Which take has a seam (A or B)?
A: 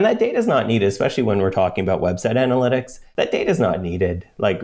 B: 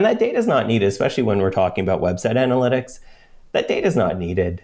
A